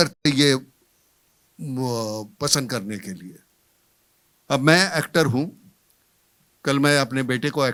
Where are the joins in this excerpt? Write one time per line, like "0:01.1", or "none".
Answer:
none

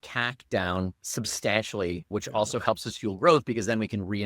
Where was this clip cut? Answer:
0:01.0
0:02.0

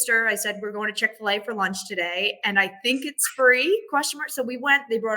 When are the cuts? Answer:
none

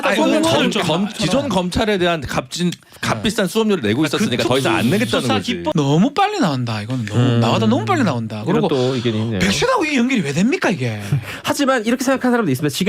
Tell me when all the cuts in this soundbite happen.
0:05.7

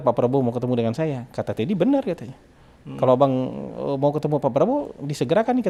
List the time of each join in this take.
none

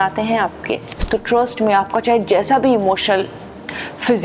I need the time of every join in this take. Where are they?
0:01.0

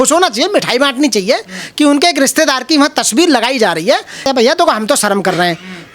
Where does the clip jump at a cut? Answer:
0:04.2

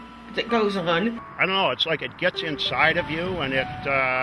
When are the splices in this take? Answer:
0:01.3

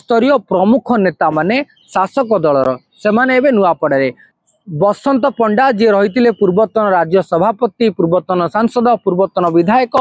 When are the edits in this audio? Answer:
0:04.3

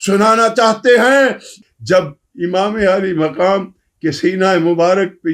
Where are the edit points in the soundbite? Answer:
0:01.6

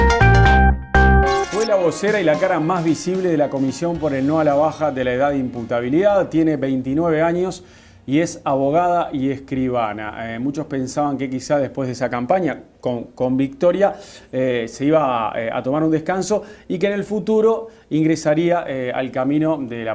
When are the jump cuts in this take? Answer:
0:01.2

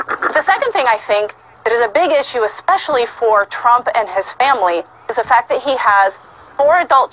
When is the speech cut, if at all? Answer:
0:04.7

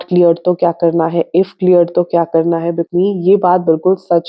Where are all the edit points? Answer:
0:02.8

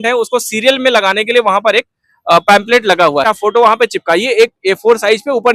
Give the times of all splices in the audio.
0:03.2

